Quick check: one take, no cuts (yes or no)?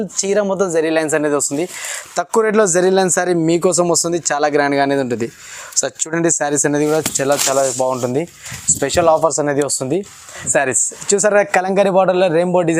no